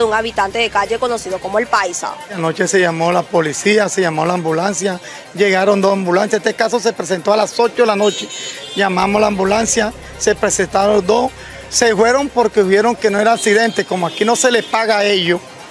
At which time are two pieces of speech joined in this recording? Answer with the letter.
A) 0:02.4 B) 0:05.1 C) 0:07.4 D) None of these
A